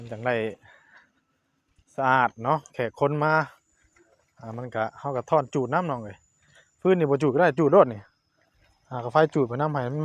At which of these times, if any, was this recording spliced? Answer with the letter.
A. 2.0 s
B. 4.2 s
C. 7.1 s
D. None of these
D